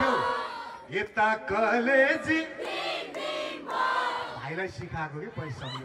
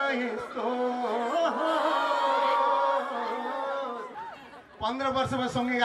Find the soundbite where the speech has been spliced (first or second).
second